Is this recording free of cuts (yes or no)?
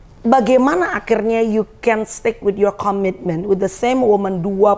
yes